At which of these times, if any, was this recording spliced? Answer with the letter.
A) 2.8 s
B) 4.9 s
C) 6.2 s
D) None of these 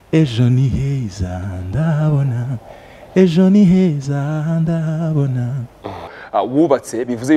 C